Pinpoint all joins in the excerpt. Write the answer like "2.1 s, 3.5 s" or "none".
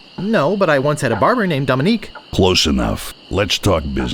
2.2 s, 3.1 s